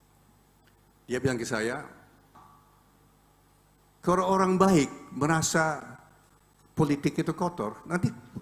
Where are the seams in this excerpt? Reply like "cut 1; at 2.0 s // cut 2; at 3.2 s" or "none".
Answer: cut 1; at 2.4 s